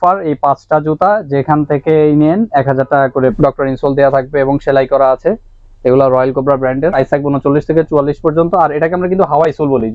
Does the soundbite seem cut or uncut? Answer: cut